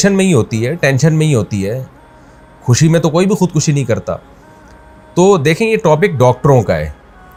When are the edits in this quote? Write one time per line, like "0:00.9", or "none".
none